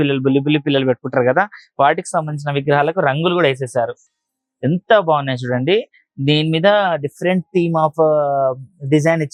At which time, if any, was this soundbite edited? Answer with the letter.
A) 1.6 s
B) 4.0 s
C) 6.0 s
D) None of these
D